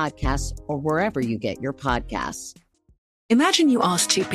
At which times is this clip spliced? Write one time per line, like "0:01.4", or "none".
0:03.1